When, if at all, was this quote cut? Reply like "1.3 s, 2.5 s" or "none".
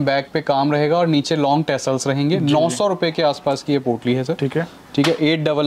none